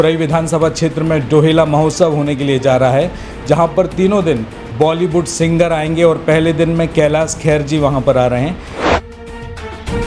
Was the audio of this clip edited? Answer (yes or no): yes